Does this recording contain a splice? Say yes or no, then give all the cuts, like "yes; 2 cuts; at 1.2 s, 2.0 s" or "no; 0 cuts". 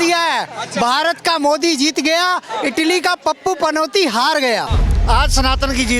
yes; 1 cut; at 4.8 s